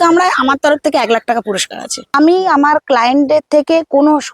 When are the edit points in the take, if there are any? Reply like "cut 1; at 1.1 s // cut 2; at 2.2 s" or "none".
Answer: cut 1; at 2.1 s